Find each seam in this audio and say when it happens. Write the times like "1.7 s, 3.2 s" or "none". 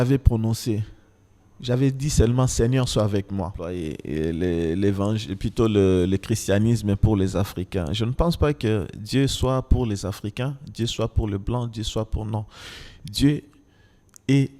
3.7 s